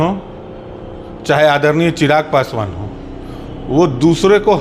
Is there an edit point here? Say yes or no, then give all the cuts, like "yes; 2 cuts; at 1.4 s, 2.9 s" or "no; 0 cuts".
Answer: no; 0 cuts